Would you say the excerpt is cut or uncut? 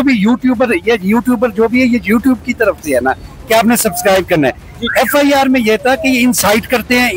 uncut